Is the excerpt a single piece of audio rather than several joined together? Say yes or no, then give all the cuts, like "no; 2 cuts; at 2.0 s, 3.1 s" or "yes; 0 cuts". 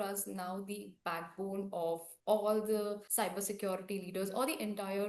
yes; 0 cuts